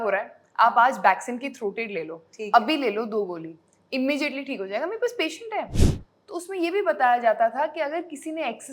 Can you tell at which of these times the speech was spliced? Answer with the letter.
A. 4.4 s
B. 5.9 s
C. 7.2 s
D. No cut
B